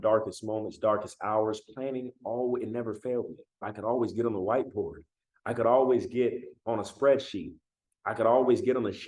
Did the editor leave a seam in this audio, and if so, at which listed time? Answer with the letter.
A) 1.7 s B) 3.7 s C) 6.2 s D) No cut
B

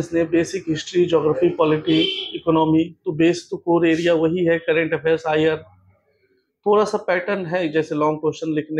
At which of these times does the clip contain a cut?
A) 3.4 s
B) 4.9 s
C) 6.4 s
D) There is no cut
D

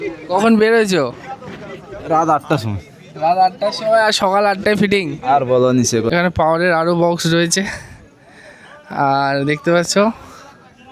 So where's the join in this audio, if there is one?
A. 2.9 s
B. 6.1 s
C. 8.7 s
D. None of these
B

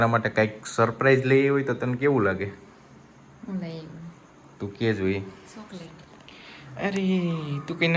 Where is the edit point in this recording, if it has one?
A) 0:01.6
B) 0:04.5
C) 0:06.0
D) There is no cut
D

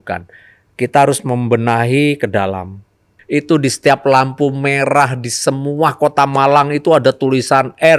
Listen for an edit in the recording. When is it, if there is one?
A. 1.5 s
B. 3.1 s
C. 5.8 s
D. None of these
B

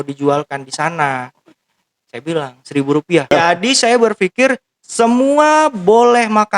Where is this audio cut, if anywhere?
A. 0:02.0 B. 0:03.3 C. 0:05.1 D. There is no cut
B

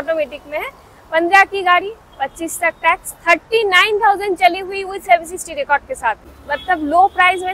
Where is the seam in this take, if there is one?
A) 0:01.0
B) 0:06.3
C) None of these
B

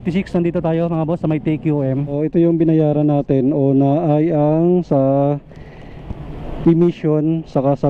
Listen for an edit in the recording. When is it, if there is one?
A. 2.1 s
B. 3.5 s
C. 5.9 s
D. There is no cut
A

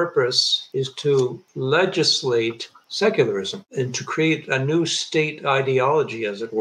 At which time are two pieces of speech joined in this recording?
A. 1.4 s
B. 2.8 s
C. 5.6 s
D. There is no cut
D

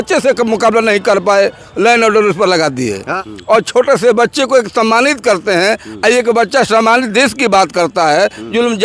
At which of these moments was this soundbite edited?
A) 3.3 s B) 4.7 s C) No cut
A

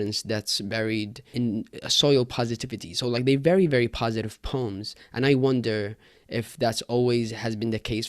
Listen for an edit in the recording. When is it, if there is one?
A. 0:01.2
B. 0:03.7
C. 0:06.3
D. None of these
A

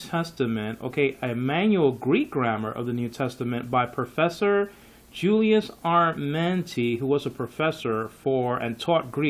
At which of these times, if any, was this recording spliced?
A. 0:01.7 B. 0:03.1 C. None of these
B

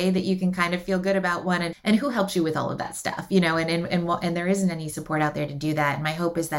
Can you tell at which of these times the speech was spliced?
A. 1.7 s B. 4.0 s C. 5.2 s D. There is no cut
A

